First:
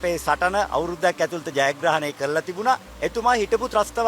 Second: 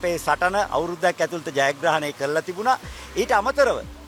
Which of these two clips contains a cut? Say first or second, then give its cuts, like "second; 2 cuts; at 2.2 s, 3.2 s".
first; 1 cut; at 2.9 s